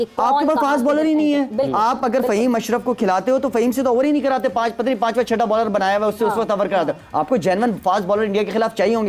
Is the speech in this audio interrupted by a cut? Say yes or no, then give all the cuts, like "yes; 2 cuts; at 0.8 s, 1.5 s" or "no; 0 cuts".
no; 0 cuts